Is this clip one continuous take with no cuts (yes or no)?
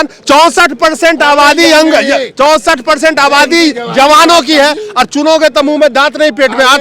yes